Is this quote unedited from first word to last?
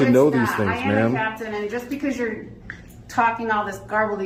yes; 0 cuts

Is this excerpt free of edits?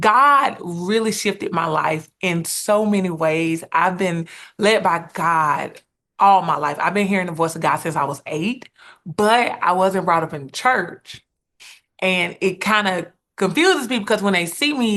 yes; 0 cuts

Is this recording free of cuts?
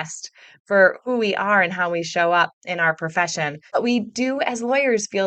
no; 1 cut; at 3.6 s

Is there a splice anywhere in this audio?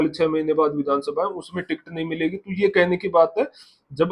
no; 0 cuts

